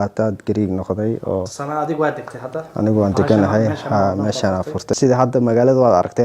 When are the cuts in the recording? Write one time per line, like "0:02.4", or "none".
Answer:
0:04.9